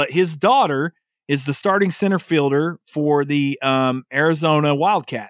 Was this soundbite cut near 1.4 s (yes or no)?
no